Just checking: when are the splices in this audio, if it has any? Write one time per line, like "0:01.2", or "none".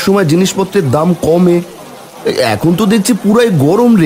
none